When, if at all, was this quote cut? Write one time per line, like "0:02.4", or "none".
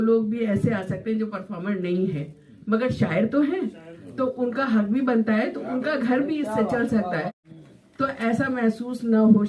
0:07.4